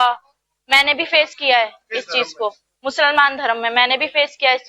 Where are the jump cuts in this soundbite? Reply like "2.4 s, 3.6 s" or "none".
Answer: none

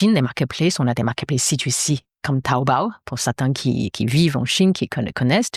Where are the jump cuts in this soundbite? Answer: none

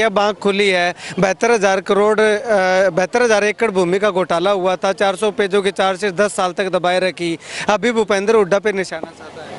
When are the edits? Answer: none

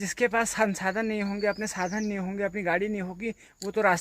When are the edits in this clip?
none

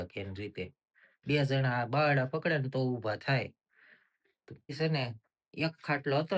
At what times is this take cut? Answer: 4.7 s

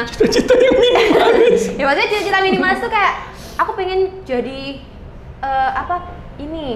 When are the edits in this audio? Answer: none

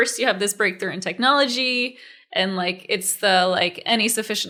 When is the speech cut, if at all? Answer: none

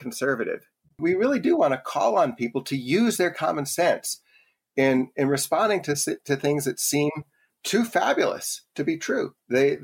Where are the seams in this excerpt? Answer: 1.0 s, 7.5 s

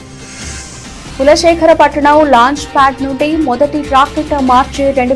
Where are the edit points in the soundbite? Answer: 1.0 s

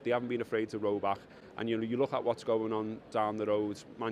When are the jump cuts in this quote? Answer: none

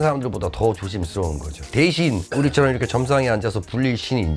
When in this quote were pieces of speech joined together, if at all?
1.6 s

